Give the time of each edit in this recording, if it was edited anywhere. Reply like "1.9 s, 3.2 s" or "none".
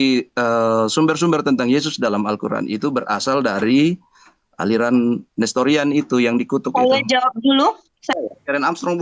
8.0 s